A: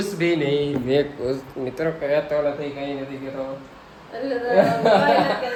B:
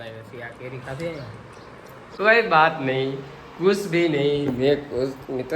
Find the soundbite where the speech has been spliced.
B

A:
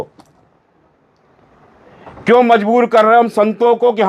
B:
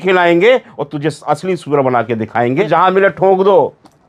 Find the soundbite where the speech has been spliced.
B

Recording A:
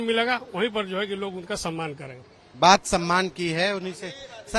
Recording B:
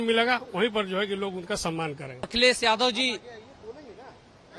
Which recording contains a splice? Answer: B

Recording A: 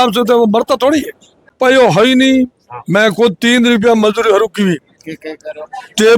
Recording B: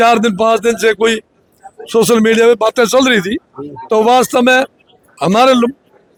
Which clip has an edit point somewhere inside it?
A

